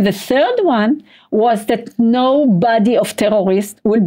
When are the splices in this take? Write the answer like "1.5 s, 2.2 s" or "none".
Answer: none